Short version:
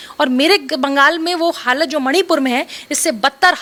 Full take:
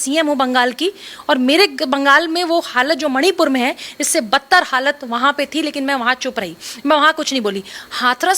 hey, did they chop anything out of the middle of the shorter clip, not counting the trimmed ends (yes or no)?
no